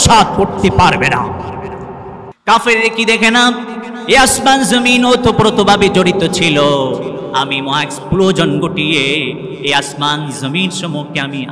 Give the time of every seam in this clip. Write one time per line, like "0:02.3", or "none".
0:02.3